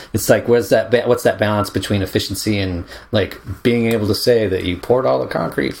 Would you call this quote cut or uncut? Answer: uncut